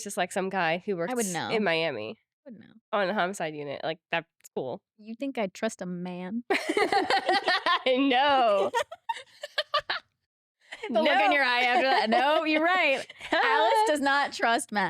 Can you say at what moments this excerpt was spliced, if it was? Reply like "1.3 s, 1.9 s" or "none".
none